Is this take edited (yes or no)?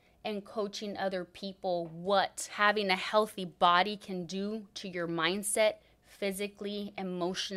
yes